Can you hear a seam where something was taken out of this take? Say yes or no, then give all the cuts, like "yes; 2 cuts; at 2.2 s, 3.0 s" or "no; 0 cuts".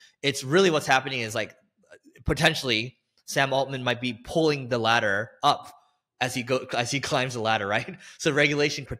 no; 0 cuts